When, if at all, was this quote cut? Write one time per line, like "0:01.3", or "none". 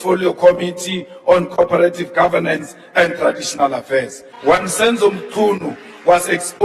0:04.2